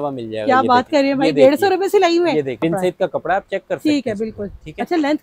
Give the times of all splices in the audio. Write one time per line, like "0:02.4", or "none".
0:02.6